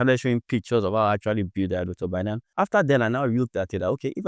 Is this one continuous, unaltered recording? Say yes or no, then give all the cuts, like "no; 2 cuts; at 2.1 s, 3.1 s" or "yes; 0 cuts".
no; 1 cut; at 2.4 s